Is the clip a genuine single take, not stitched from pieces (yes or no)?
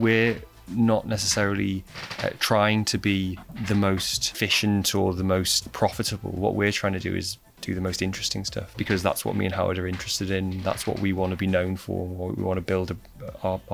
no